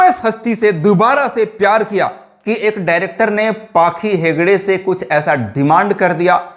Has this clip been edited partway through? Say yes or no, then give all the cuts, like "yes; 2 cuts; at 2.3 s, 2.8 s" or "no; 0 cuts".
yes; 1 cut; at 2.4 s